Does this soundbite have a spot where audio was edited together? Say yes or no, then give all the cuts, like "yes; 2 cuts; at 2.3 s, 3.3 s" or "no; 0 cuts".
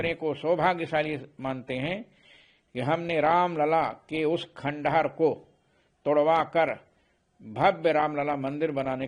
no; 0 cuts